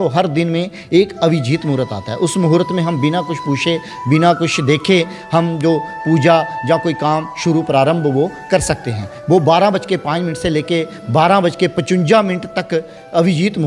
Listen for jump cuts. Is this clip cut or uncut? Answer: uncut